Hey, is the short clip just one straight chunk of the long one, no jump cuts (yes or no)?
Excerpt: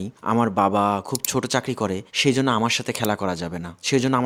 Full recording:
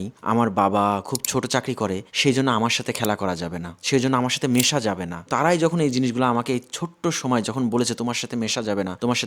yes